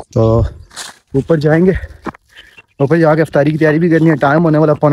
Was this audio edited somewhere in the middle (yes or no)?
no